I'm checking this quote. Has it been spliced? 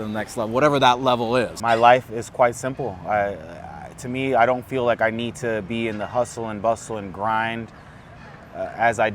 yes; 1 cut; at 1.6 s

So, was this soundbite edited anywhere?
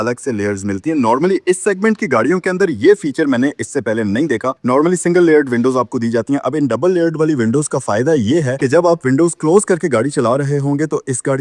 yes; 1 cut; at 8.5 s

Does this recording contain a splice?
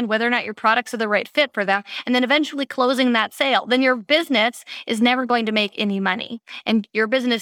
no; 0 cuts

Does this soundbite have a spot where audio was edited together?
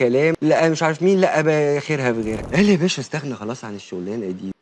yes; 1 cut; at 2.4 s

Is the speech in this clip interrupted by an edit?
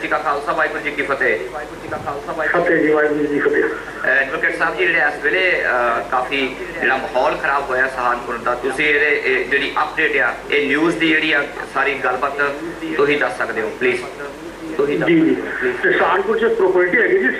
no; 0 cuts

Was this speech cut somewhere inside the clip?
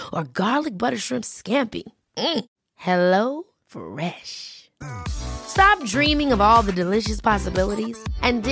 no; 0 cuts

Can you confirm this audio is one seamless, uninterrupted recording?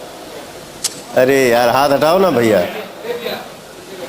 no; 1 cut; at 1.5 s

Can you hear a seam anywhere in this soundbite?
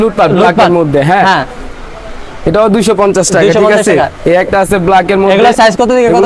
no; 0 cuts

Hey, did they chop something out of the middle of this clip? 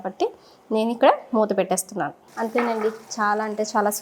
yes; 1 cut; at 2.2 s

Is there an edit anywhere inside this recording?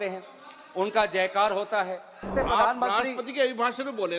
yes; 1 cut; at 2.3 s

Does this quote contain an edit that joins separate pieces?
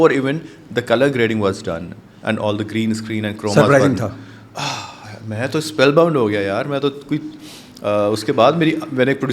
no; 0 cuts

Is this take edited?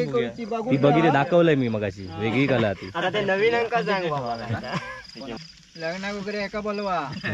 yes; 1 cut; at 5.4 s

